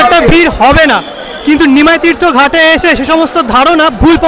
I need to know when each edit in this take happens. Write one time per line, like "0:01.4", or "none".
none